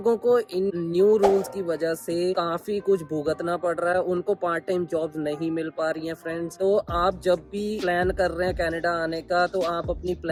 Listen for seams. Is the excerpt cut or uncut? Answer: uncut